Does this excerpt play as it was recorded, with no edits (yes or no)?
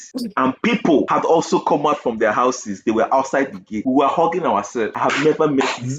no